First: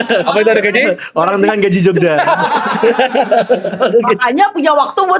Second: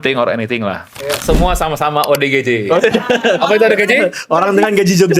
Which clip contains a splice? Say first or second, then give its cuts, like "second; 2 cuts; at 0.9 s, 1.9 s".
second; 1 cut; at 1.2 s